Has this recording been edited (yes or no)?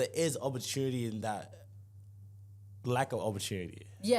no